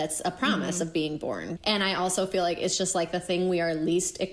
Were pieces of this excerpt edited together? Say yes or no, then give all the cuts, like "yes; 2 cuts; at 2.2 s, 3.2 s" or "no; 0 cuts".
yes; 1 cut; at 1.5 s